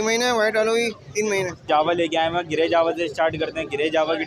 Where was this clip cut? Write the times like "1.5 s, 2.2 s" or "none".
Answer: 1.6 s

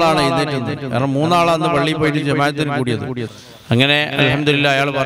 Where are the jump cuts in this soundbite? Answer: 3.3 s

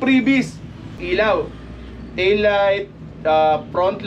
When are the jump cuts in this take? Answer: 1.0 s

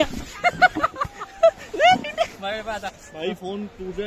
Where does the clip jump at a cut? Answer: 1.7 s

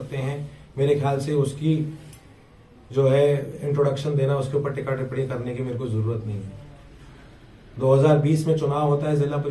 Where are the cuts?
none

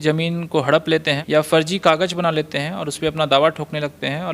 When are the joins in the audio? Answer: 1.2 s

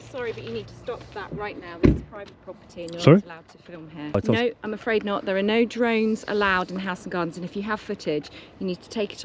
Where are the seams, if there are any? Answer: 4.2 s

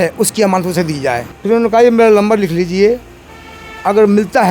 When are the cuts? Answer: 1.3 s

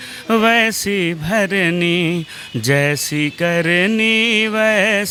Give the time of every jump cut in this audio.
none

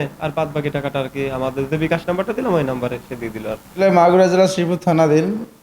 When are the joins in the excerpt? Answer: 3.8 s

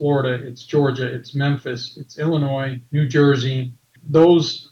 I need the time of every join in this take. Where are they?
none

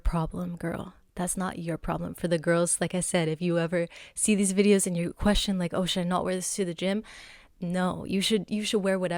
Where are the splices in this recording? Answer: none

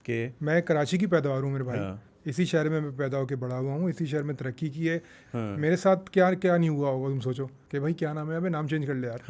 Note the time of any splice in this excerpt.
5.2 s, 7.5 s

